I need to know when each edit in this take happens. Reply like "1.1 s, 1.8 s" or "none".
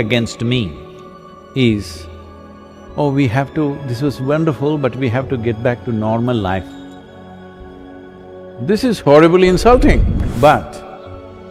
10.2 s